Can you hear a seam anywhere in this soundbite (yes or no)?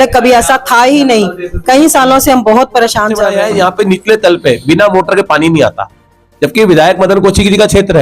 yes